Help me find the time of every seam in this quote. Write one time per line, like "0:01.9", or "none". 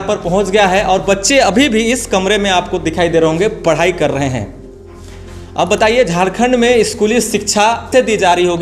none